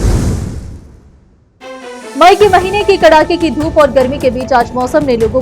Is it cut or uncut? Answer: cut